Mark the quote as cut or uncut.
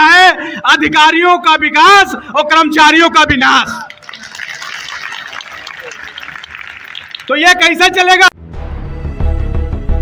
uncut